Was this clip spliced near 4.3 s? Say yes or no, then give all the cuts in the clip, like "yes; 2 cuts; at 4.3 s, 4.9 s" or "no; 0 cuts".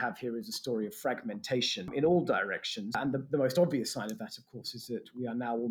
no; 2 cuts; at 1.9 s, 3.0 s